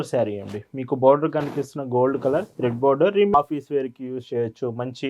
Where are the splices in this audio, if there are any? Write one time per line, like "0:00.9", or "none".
0:03.3